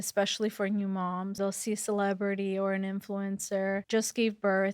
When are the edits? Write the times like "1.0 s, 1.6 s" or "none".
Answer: 1.4 s, 3.8 s